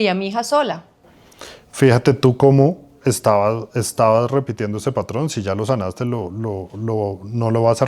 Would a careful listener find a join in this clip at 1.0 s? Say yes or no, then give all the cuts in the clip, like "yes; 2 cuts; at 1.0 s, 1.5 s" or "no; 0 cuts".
yes; 1 cut; at 1.0 s